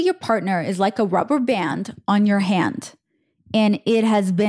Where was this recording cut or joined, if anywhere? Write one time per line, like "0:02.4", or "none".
none